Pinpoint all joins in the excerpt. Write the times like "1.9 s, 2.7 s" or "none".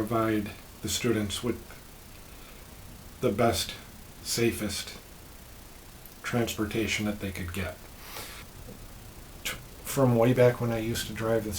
8.5 s